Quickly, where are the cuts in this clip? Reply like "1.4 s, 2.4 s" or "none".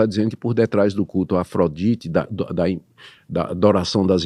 none